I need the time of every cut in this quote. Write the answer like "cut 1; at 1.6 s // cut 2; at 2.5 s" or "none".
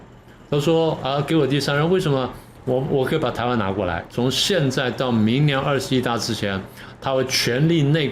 cut 1; at 4.1 s